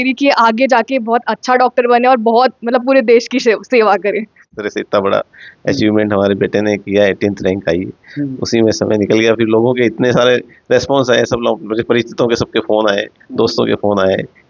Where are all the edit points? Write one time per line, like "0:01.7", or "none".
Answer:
0:04.5